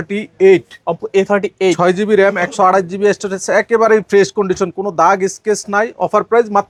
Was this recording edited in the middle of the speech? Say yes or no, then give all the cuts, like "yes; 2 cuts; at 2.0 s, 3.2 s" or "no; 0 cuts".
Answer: no; 0 cuts